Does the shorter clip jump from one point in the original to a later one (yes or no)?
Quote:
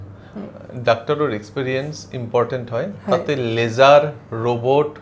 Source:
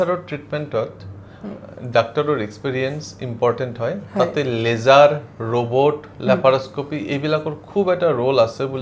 no